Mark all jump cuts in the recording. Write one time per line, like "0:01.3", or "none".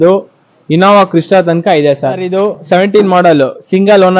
0:02.3